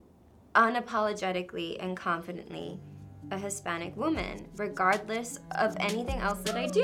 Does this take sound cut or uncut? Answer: uncut